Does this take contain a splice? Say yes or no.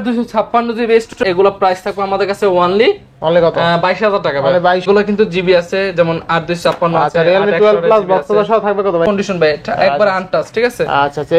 yes